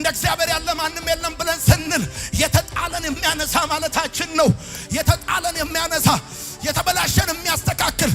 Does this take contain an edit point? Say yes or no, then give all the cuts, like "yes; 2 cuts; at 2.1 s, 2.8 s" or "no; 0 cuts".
no; 0 cuts